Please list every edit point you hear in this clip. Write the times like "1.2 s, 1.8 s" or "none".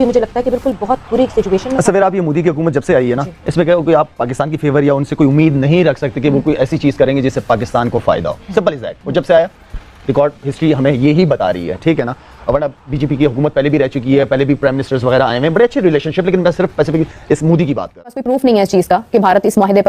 17.9 s